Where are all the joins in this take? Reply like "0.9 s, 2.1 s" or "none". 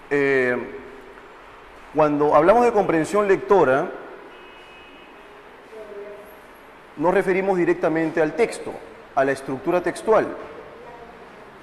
3.9 s